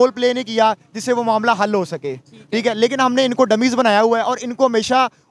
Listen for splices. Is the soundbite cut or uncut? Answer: uncut